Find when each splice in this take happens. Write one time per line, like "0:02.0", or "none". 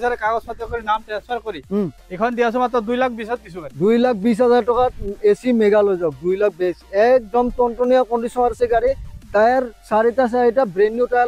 none